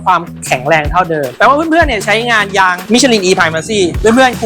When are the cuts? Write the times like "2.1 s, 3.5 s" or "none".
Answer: 1.3 s